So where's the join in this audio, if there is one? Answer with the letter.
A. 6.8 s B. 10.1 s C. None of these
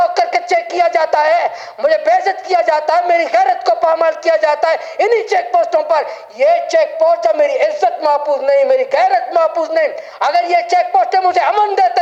C